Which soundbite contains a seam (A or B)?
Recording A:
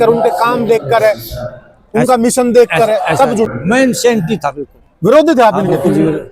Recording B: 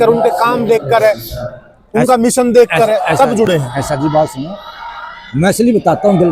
A